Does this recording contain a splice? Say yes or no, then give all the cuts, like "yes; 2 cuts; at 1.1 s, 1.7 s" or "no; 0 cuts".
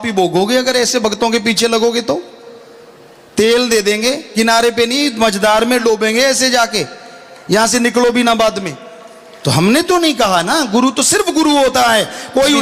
no; 0 cuts